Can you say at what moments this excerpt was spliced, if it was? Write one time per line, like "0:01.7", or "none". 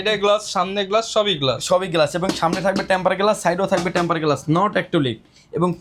none